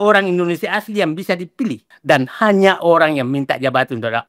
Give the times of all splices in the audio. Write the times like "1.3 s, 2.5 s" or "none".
1.9 s